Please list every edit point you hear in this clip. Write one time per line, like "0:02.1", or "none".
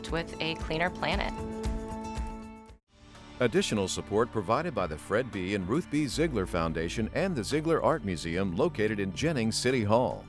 0:03.2